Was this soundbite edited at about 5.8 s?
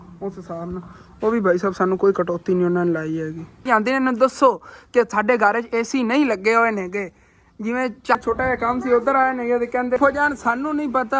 no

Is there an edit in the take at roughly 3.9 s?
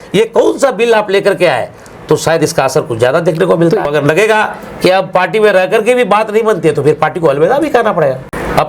yes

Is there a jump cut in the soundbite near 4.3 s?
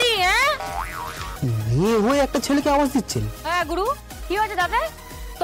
no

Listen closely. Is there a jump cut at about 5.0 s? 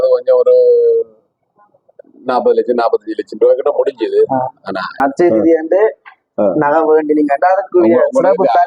yes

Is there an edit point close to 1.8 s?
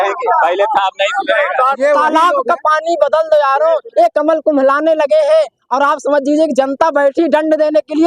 yes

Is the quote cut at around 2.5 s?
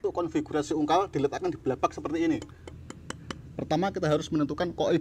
no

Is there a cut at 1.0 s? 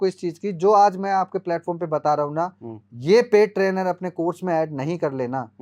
no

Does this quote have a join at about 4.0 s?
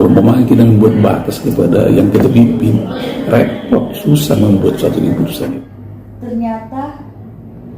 no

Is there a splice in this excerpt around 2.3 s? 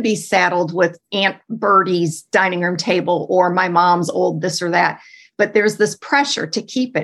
no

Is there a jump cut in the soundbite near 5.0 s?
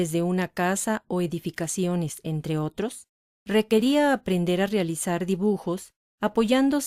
no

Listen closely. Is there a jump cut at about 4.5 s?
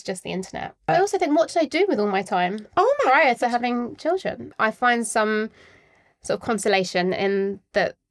yes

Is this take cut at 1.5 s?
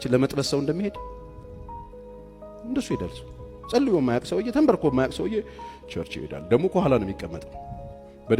no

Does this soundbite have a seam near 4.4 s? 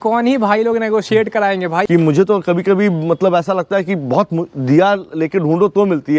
no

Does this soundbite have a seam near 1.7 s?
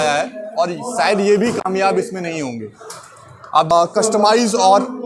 no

